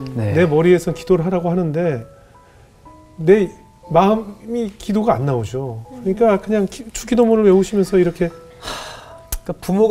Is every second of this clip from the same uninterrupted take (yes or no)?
yes